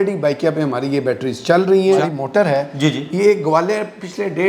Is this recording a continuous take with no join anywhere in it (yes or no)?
no